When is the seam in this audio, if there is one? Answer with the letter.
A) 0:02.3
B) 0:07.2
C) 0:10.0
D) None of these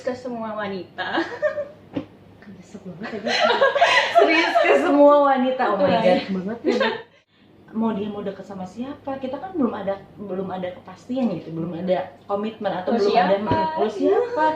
B